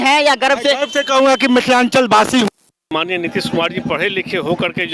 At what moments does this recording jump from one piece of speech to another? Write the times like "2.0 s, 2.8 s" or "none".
2.9 s

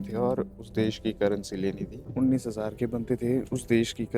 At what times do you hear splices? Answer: 2.1 s

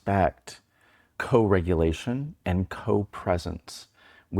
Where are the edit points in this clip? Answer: 1.1 s

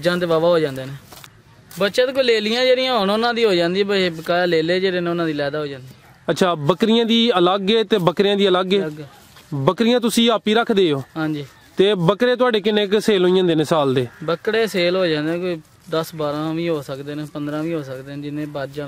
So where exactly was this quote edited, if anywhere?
1.3 s

